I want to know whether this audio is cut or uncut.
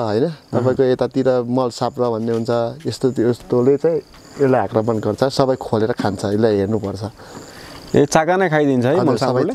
uncut